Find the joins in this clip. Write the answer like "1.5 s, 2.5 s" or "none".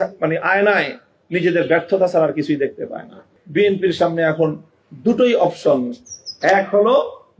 3.3 s